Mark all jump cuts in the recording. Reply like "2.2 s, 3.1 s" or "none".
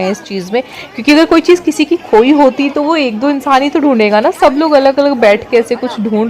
none